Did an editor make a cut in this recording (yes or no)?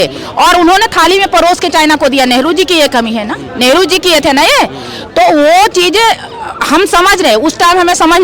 no